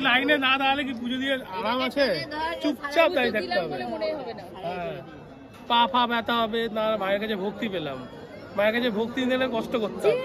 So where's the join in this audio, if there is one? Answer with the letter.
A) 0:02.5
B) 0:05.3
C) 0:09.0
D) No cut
D